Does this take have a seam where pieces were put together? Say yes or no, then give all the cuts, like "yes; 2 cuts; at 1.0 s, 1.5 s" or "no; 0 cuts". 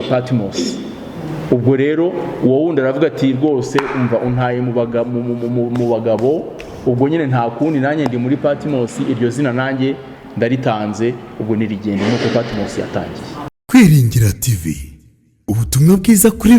yes; 1 cut; at 13.6 s